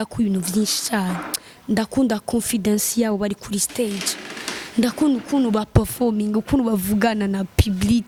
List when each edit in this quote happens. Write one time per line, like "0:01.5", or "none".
none